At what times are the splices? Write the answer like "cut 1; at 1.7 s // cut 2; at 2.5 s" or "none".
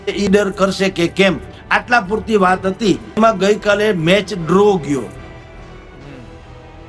cut 1; at 3.1 s